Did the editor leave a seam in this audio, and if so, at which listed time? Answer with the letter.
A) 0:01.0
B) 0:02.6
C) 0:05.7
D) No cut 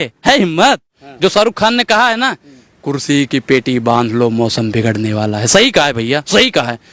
A